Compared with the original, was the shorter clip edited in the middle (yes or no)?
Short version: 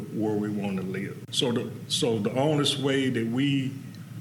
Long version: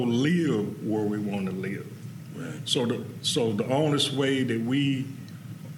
yes